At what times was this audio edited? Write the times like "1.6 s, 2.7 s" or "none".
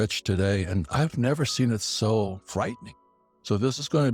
2.8 s